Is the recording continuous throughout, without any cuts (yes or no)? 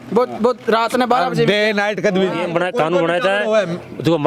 no